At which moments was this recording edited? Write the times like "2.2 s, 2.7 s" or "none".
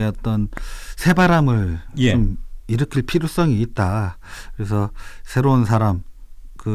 none